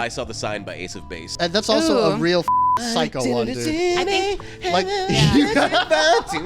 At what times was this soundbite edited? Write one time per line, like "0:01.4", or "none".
0:01.3